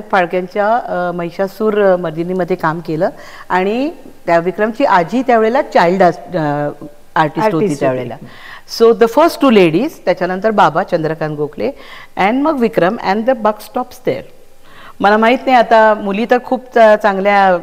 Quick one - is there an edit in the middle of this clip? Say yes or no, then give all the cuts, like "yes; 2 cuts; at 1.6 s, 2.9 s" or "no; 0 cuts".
no; 0 cuts